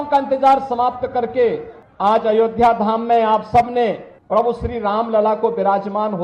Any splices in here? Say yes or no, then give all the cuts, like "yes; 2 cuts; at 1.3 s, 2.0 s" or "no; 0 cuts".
no; 0 cuts